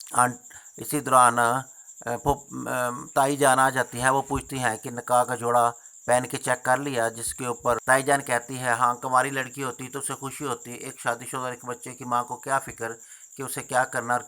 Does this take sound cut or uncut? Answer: cut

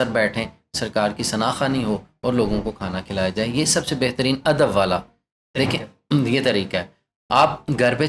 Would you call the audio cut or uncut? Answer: uncut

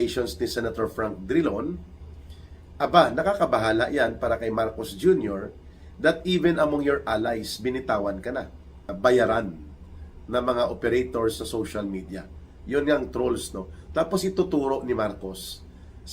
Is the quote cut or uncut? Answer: cut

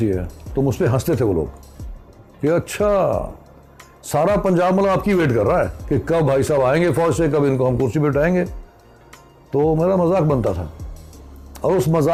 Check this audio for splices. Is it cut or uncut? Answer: uncut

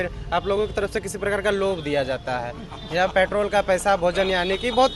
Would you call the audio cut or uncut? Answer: uncut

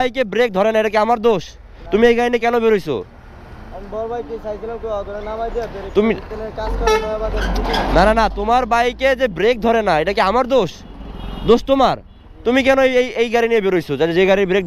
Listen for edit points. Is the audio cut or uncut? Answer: uncut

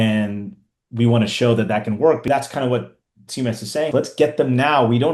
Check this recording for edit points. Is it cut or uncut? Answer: cut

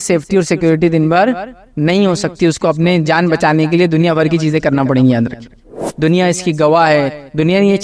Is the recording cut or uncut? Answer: cut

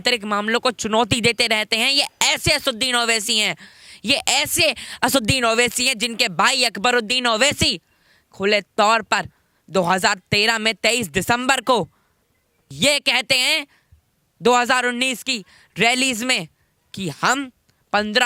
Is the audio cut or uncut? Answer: uncut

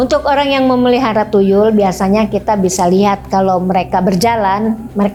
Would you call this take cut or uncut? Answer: uncut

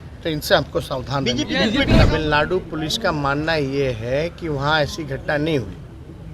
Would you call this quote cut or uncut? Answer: cut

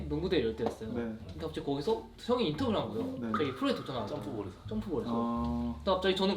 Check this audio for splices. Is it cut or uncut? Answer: uncut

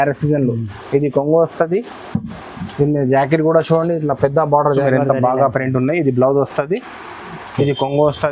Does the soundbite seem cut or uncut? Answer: cut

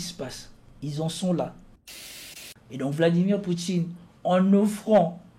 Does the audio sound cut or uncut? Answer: cut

